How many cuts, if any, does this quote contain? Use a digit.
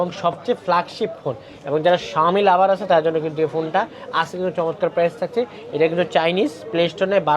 0